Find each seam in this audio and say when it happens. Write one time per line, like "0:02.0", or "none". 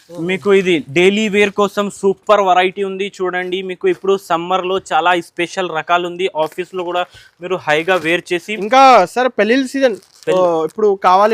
none